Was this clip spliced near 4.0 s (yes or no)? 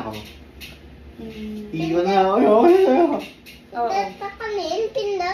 no